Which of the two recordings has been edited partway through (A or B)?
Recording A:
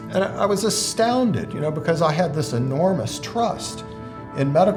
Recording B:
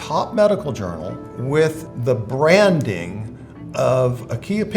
B